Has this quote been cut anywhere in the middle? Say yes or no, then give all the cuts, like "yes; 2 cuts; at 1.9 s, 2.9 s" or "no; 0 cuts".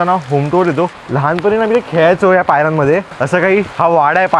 yes; 2 cuts; at 1.0 s, 3.3 s